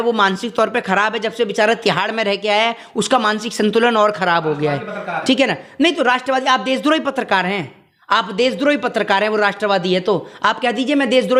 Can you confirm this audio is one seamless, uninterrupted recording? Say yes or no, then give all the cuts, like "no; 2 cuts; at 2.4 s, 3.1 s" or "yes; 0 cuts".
yes; 0 cuts